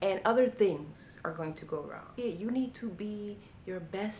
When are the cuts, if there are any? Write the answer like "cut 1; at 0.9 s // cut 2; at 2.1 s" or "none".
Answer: cut 1; at 2.1 s